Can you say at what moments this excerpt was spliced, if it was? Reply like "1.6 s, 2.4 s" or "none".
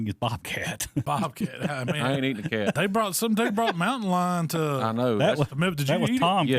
1.0 s, 2.8 s